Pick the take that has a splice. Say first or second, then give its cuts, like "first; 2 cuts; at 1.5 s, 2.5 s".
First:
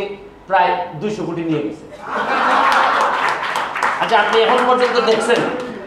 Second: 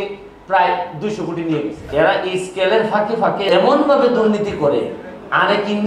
second; 2 cuts; at 1.8 s, 3.4 s